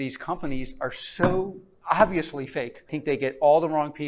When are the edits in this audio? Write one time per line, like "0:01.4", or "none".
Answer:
0:02.9